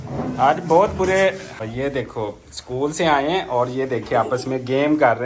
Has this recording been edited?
yes; 1 cut; at 1.5 s

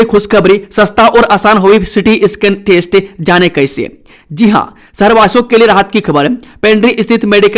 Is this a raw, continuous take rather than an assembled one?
yes; 0 cuts

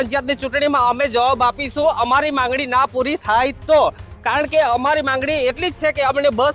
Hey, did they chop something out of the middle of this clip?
no; 0 cuts

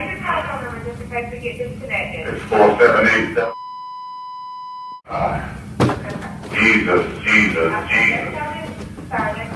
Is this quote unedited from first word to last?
yes; 0 cuts

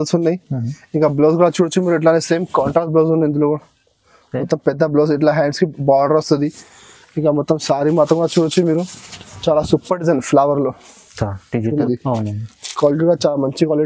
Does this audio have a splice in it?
yes; 1 cut; at 11.8 s

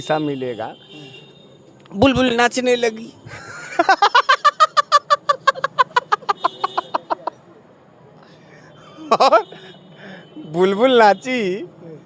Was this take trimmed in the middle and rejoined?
no; 0 cuts

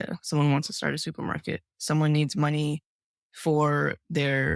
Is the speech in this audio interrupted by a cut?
no; 0 cuts

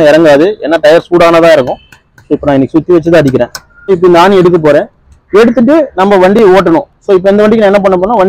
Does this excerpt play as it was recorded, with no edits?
no; 1 cut; at 3.7 s

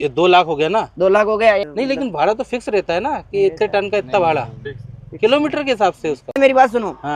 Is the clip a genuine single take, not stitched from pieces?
no; 2 cuts; at 1.7 s, 6.4 s

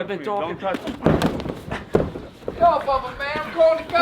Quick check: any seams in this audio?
yes; 1 cut; at 2.4 s

